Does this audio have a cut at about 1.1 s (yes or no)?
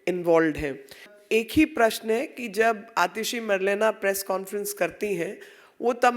yes